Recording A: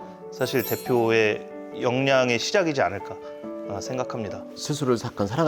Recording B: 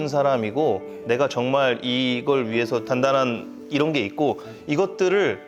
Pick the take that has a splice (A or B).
A